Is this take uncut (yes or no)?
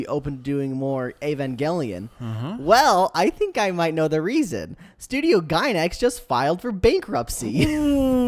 yes